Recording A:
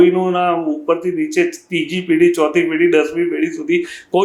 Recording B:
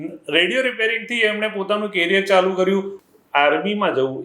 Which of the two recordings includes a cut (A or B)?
B